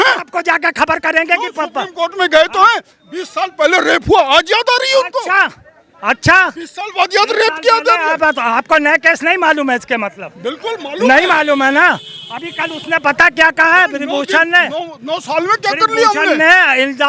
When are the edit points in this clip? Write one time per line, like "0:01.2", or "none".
none